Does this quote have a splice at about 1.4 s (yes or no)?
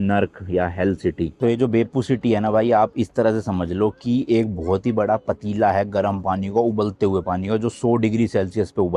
yes